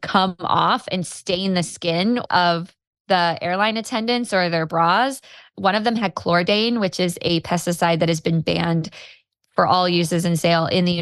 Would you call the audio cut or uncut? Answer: cut